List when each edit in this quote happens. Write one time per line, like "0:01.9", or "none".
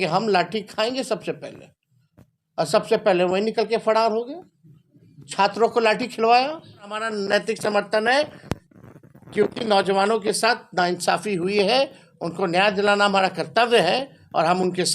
0:07.1

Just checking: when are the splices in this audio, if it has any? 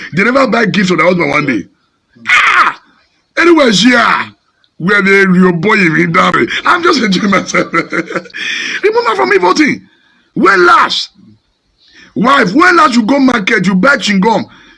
none

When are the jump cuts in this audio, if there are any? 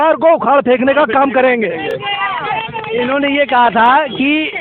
none

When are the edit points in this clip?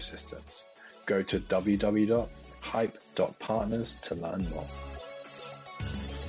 0:04.7

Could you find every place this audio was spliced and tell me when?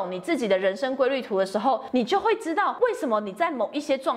0:01.8
0:02.8

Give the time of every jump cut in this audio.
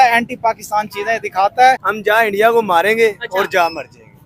0:01.9

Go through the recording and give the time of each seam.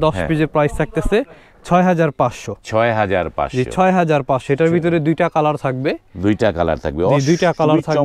none

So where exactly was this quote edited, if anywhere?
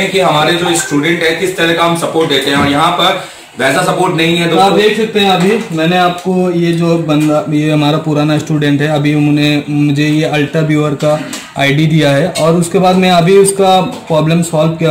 none

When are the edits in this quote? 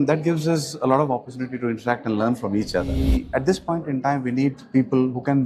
0:03.0

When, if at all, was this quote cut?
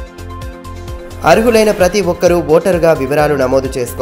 0:01.1

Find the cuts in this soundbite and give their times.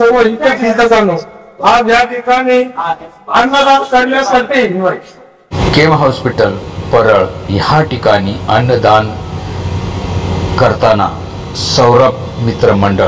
0:05.5

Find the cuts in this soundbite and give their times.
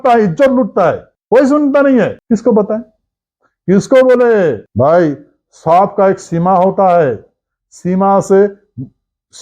0:01.1
0:02.2
0:04.6

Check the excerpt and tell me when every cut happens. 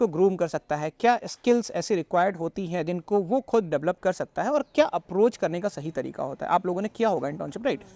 none

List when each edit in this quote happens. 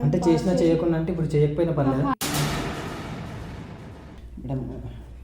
0:04.0

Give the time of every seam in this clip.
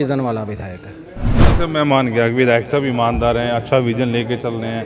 0:01.4

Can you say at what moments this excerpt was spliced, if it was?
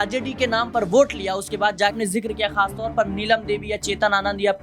0:02.0

